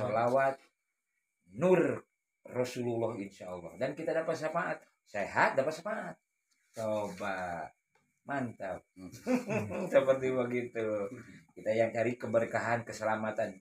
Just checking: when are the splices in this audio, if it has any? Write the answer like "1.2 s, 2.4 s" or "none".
none

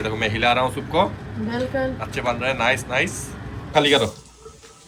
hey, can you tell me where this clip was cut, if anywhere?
3.7 s

